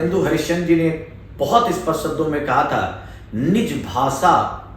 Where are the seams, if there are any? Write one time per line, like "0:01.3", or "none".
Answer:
none